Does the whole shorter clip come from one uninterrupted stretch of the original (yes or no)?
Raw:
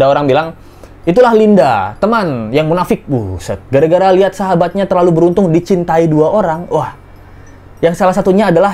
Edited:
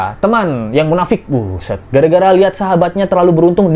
yes